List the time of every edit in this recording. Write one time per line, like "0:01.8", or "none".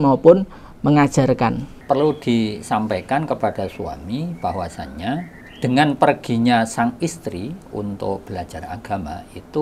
0:01.7
0:05.4